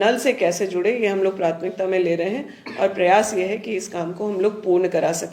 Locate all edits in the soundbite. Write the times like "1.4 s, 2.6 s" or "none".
none